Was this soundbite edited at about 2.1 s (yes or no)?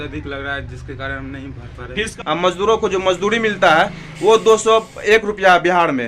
yes